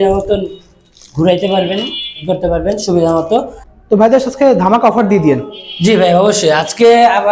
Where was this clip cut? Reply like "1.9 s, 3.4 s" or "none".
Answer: 3.6 s